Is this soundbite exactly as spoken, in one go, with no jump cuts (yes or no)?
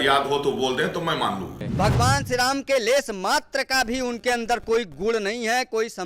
no